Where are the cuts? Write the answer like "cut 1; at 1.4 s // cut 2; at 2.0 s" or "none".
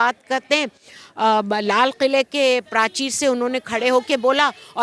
cut 1; at 1.9 s